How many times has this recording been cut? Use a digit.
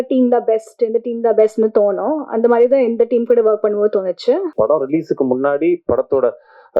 1